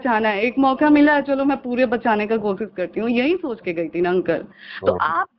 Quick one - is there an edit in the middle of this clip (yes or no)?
no